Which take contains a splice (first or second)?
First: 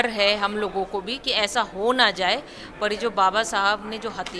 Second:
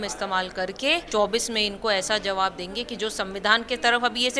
second